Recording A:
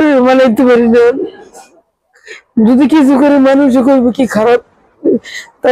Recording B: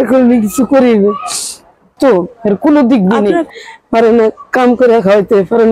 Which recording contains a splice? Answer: B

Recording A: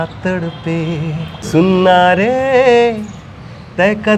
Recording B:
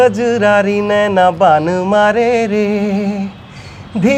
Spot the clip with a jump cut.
A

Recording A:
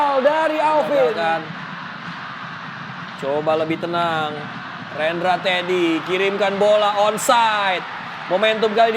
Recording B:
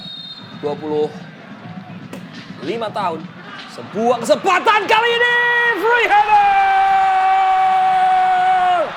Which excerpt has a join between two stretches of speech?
A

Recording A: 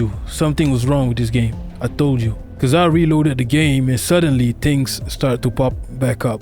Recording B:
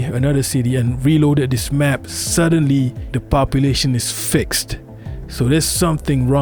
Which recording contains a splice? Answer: A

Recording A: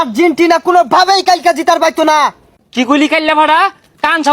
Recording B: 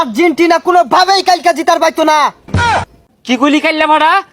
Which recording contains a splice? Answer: A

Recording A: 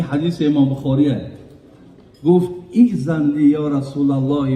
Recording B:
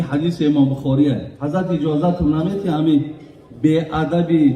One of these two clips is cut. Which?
B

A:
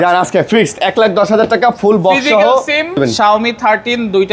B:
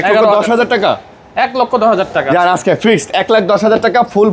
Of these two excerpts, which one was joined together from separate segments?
A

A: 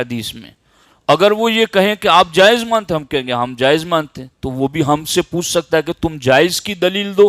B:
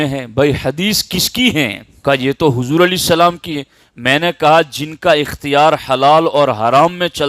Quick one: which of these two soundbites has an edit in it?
B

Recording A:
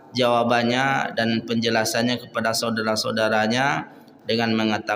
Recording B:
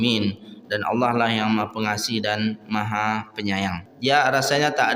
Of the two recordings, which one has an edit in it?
B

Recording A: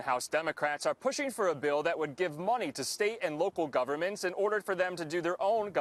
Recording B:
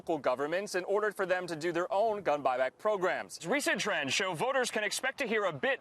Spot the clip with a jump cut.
B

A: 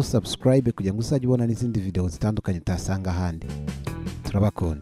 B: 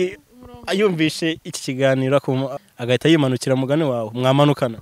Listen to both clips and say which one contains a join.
B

